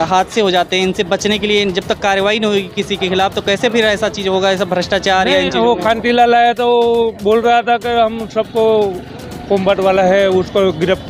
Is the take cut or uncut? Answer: uncut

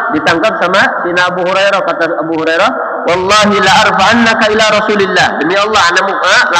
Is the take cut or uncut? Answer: uncut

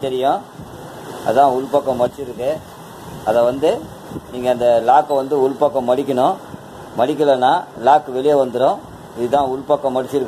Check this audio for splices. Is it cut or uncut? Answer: uncut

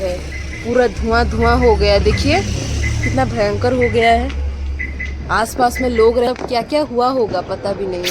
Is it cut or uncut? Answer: cut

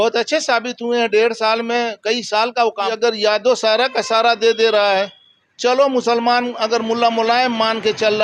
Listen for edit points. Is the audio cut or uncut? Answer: cut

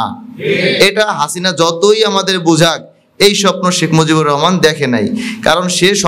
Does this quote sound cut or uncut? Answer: uncut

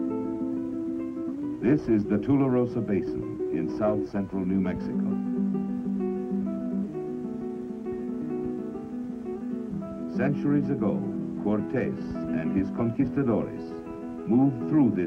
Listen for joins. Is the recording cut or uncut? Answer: cut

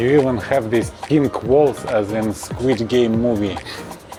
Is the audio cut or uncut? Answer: uncut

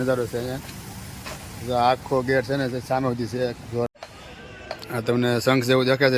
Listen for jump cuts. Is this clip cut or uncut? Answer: cut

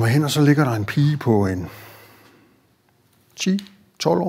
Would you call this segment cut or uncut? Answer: uncut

